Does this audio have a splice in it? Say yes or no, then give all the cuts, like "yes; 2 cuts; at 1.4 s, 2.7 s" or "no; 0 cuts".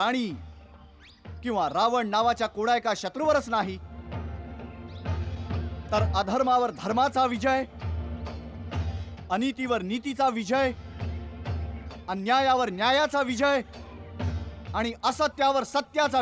no; 0 cuts